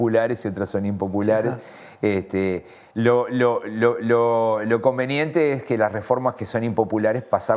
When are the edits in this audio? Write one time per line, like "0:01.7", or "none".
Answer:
none